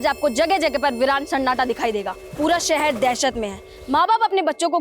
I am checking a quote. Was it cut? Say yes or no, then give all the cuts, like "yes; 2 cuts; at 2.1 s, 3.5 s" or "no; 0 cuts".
yes; 1 cut; at 2.2 s